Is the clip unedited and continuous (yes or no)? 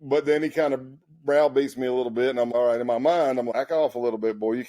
no